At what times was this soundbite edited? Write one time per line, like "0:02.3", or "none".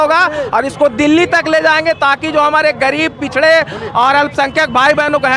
none